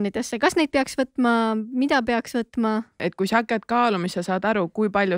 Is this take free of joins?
no; 1 cut; at 3.0 s

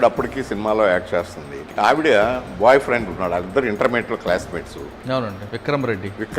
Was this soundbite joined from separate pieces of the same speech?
yes; 2 cuts; at 1.7 s, 5.3 s

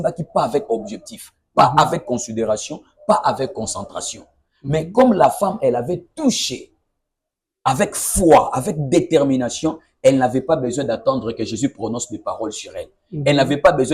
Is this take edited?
no; 0 cuts

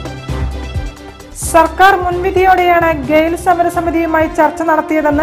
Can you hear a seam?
yes; 1 cut; at 0.9 s

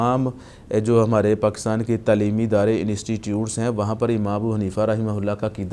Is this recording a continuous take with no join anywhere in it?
yes; 0 cuts

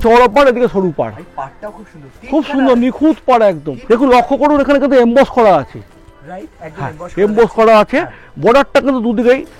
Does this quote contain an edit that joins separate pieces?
yes; 1 cut; at 3.7 s

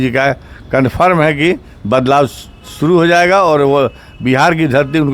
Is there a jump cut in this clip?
no; 0 cuts

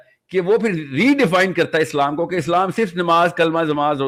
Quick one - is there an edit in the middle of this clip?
no; 0 cuts

